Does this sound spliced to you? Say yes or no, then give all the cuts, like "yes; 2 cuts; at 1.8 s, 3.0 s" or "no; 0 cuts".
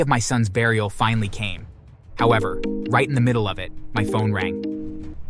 no; 0 cuts